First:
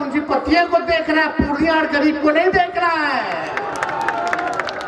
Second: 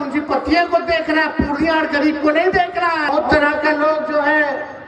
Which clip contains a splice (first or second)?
second